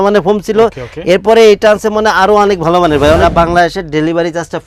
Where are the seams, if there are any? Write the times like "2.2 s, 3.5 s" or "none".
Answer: 3.2 s